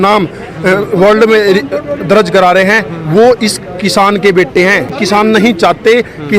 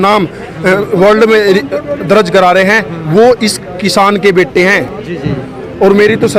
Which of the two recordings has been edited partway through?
first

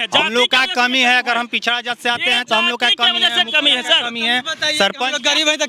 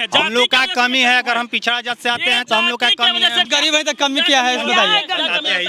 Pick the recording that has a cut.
second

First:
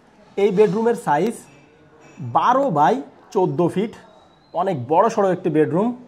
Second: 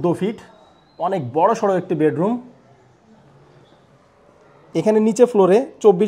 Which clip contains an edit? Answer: second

